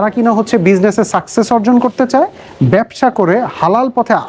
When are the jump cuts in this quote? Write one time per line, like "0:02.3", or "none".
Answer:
none